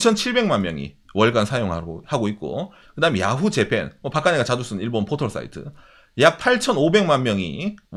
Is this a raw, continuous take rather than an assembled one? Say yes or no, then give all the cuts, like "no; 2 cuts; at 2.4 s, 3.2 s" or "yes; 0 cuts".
yes; 0 cuts